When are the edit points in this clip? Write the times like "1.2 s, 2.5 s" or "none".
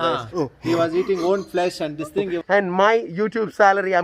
2.4 s